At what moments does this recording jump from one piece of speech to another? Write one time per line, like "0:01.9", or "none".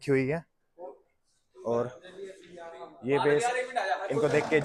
none